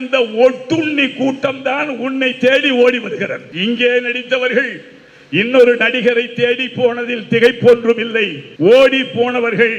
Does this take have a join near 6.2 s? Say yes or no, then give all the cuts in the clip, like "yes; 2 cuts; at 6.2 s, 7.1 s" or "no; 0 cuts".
no; 2 cuts; at 3.4 s, 8.4 s